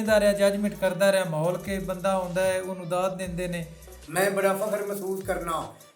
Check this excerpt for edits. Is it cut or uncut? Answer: cut